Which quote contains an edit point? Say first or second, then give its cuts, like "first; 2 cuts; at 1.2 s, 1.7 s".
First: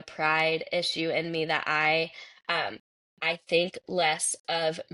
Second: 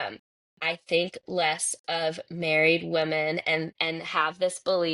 second; 1 cut; at 3.8 s